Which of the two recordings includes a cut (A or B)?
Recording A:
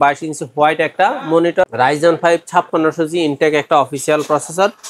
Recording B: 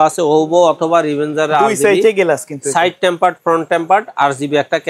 A